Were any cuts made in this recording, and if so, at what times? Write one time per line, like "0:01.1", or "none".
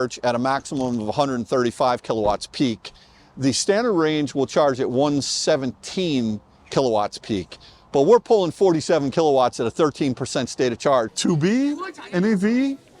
0:11.1